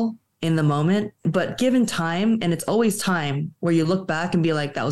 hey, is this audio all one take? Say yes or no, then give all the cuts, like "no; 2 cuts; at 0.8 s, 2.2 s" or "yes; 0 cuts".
no; 1 cut; at 1.2 s